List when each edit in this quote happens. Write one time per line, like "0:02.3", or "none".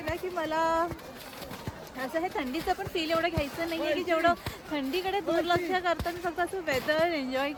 none